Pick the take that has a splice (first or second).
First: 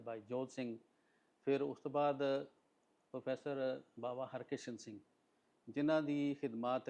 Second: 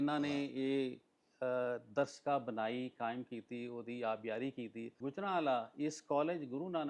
second